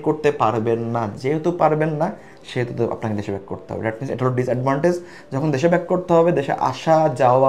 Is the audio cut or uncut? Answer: uncut